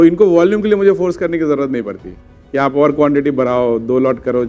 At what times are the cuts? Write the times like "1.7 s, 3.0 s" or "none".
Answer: none